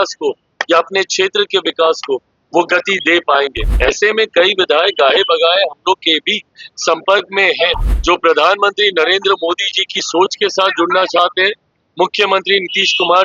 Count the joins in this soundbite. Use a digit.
2